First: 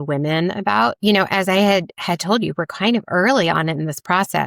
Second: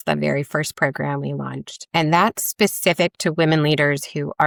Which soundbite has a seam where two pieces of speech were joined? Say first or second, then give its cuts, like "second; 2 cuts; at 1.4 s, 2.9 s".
first; 1 cut; at 1.0 s